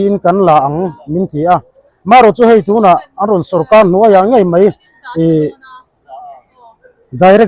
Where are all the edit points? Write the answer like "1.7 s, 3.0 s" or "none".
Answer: none